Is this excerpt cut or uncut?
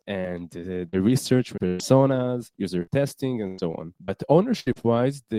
cut